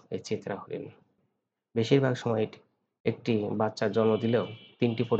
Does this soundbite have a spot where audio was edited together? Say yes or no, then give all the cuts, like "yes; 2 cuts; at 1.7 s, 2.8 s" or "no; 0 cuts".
yes; 1 cut; at 1.1 s